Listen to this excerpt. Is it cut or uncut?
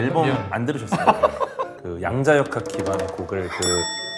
cut